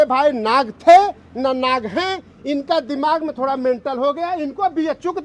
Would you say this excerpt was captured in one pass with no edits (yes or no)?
yes